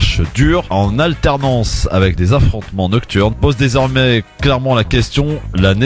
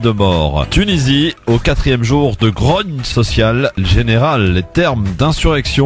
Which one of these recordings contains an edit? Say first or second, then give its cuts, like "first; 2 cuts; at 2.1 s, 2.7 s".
second; 1 cut; at 3.1 s